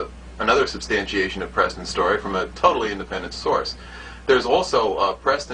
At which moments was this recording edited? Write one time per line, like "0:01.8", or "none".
0:02.8